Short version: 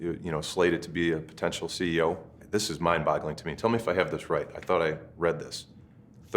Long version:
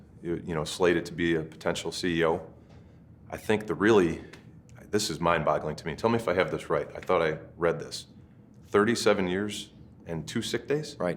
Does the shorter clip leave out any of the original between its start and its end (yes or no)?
yes